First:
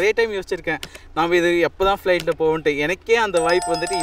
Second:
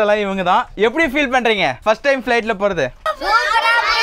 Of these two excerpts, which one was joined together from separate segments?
second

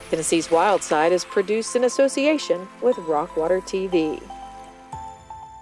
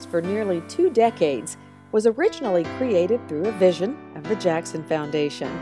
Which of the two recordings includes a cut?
first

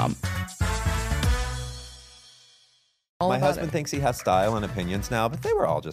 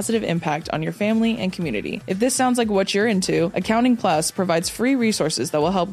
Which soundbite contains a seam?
first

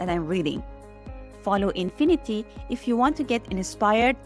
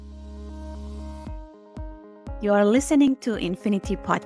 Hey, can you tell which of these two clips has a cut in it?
second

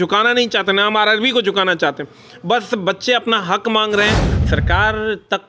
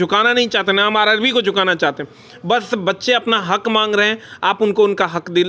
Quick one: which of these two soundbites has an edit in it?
first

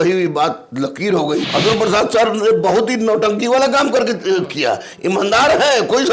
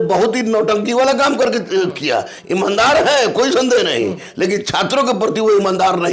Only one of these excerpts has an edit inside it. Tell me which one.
first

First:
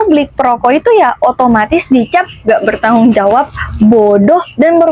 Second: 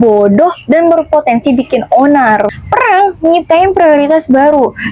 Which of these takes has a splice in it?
second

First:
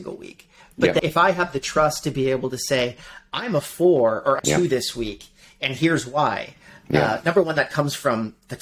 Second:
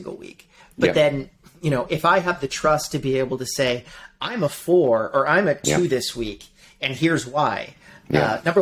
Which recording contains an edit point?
first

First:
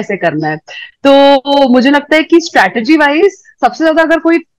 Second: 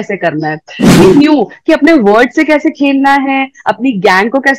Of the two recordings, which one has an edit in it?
second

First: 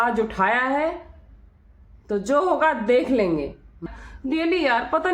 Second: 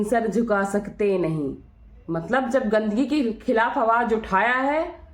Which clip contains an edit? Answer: first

